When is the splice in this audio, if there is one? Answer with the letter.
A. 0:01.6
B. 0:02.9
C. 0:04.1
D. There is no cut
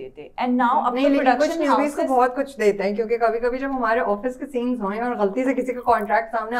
D